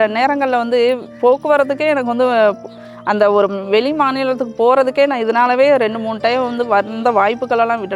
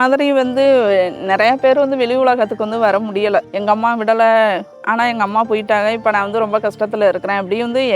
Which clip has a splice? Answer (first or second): second